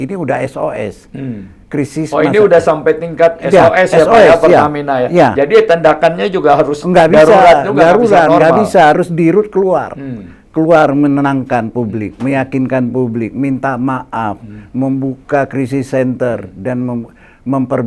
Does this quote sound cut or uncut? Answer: uncut